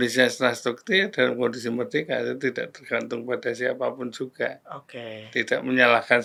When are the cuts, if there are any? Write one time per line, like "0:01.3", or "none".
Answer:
none